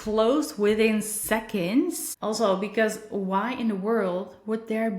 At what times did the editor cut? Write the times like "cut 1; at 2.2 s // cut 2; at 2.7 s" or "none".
cut 1; at 2.1 s